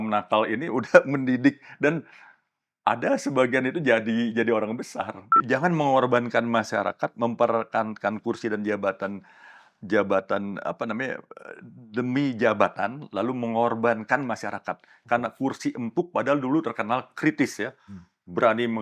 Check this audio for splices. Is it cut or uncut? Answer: cut